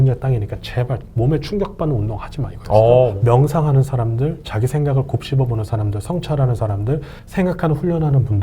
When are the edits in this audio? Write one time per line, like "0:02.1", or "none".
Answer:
0:01.0
0:03.2
0:07.2